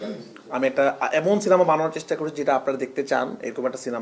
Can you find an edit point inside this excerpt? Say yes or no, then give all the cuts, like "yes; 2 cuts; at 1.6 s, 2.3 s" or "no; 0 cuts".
no; 0 cuts